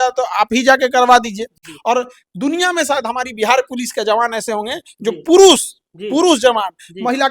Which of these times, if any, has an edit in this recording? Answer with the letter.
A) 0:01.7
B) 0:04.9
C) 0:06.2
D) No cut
A